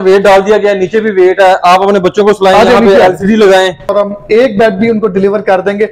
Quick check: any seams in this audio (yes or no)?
yes